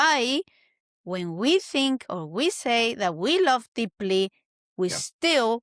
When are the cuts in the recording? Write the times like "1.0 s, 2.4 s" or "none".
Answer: none